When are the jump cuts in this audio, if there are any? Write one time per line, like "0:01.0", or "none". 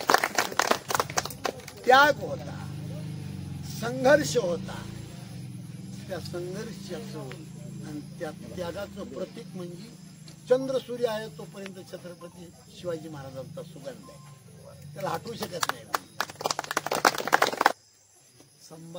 0:17.7